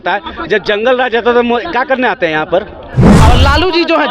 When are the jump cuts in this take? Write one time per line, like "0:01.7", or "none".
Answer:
0:03.2